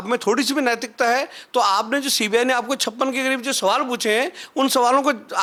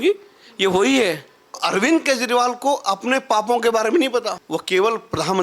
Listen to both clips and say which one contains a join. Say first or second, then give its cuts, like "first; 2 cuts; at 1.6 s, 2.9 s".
second; 2 cuts; at 1.6 s, 4.4 s